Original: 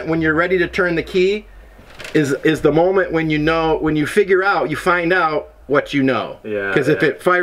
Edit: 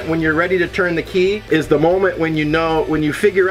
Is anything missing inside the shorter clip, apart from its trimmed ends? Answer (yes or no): yes